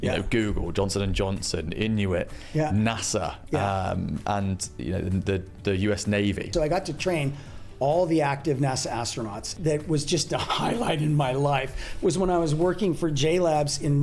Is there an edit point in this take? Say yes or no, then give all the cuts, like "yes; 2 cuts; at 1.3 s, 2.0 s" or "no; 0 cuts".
yes; 2 cuts; at 6.5 s, 9.5 s